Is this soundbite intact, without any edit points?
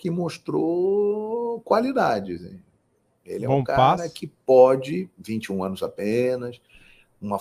yes; 0 cuts

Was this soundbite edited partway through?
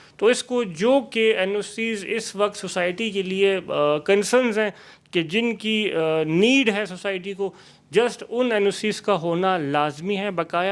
no; 0 cuts

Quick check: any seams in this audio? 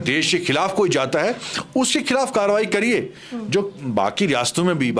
no; 0 cuts

